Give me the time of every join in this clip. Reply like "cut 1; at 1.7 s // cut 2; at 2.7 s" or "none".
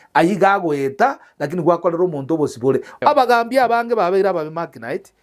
cut 1; at 3.0 s

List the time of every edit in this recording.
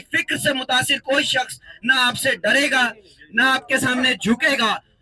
none

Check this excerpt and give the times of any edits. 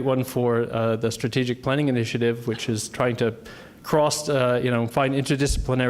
cut 1; at 2.6 s

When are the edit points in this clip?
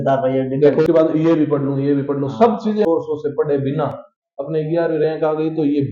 cut 1; at 0.9 s // cut 2; at 2.8 s

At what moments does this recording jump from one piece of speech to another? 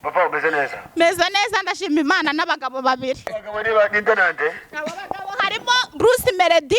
cut 1; at 3.4 s

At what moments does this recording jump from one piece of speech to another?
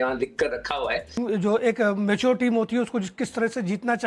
cut 1; at 1.2 s

